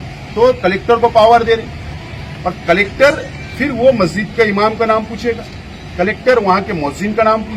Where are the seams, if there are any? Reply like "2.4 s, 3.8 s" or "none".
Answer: none